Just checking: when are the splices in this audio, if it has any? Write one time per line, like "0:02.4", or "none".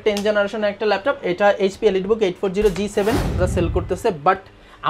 0:03.4